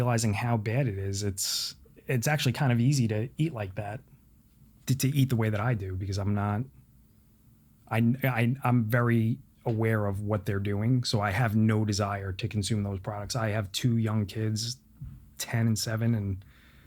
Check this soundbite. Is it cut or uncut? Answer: uncut